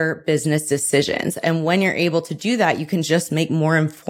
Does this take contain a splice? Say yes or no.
no